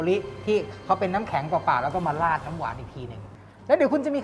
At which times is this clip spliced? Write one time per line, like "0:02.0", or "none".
0:03.3